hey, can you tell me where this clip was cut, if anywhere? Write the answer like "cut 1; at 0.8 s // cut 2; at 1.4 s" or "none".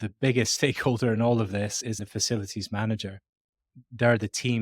cut 1; at 2.0 s // cut 2; at 3.7 s